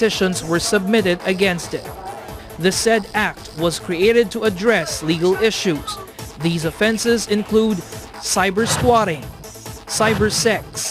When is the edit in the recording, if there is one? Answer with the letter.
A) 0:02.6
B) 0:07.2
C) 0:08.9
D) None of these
B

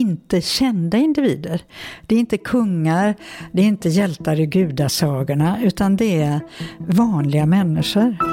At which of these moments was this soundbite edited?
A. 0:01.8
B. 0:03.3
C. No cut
C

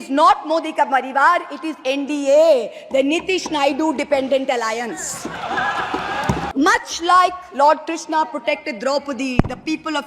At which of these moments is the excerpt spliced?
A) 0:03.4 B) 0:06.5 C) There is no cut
B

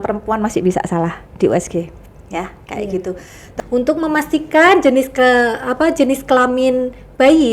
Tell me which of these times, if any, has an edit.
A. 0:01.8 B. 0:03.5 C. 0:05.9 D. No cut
B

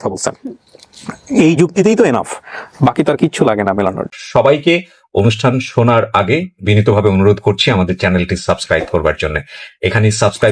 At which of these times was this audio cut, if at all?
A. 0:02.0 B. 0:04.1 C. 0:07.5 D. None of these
B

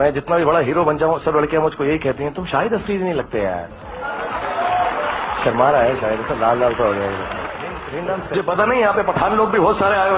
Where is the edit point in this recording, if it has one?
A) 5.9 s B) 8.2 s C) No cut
C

